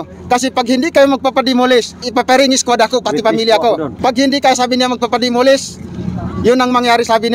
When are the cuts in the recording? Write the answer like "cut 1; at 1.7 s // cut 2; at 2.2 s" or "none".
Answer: cut 1; at 2.1 s // cut 2; at 3.9 s